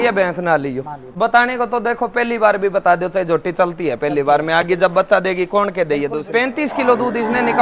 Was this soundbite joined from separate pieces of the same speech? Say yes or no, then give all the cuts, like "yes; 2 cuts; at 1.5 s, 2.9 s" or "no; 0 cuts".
yes; 2 cuts; at 1.0 s, 6.2 s